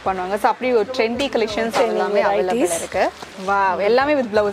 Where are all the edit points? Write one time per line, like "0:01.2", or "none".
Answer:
0:03.2